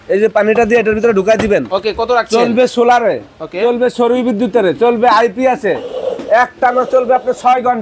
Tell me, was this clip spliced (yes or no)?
no